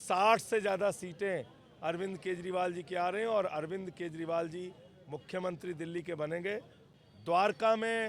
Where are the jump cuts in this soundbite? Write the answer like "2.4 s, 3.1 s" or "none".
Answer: 6.8 s